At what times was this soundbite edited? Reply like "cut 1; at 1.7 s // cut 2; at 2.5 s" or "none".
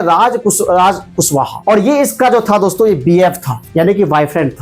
cut 1; at 1.5 s